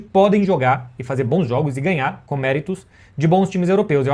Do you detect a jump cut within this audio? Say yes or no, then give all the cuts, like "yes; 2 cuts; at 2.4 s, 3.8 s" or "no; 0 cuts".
no; 0 cuts